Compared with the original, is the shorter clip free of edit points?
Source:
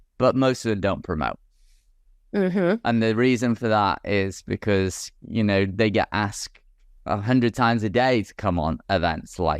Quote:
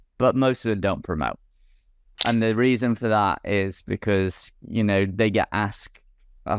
no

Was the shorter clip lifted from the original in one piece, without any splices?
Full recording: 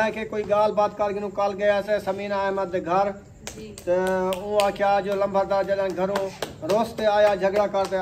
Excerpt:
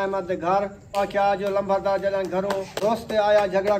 no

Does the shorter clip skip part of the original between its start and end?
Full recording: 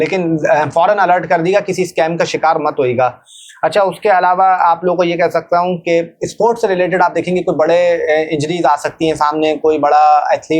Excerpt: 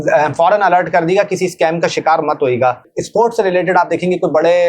yes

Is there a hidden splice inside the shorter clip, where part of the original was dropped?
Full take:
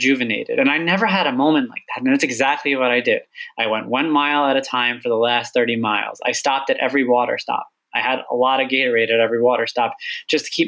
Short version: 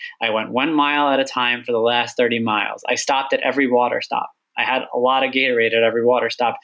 no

